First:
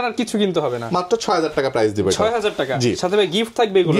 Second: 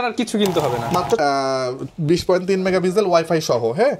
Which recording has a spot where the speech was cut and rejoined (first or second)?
second